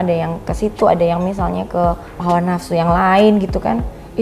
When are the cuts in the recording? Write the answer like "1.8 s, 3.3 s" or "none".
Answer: 2.1 s